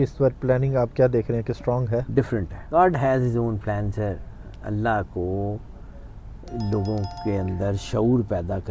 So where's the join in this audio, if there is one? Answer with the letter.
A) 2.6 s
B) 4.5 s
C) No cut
A